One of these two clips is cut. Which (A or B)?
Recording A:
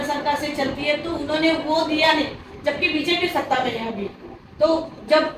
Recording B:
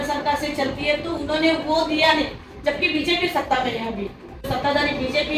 B